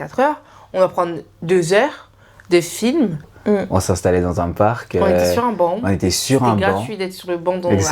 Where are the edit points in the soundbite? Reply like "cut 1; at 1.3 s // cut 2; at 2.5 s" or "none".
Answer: cut 1; at 3.3 s